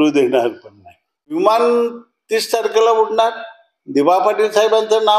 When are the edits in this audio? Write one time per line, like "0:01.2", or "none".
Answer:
0:01.3